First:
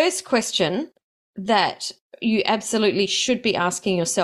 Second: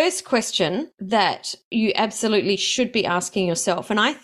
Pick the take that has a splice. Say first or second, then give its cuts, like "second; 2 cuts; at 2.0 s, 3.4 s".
second; 1 cut; at 1.3 s